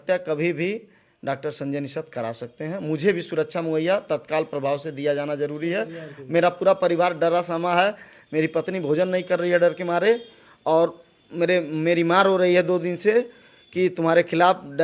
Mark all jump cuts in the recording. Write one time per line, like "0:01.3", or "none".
none